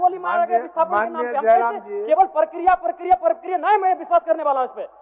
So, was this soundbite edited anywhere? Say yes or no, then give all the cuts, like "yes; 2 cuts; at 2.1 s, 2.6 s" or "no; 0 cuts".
no; 0 cuts